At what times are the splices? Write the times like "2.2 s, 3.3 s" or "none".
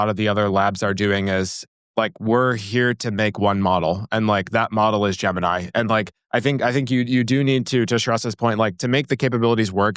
none

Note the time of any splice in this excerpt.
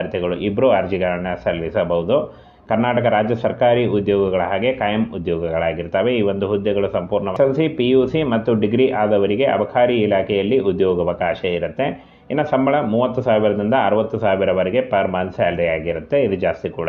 7.3 s

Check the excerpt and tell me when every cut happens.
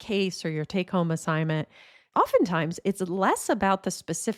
none

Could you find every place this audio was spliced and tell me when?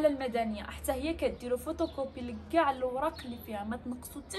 none

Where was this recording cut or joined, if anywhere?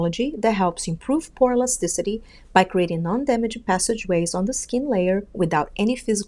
none

